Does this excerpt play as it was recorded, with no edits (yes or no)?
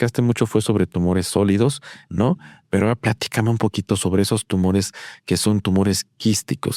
yes